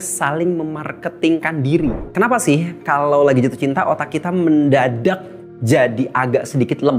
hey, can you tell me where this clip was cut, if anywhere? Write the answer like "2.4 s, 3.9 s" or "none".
2.1 s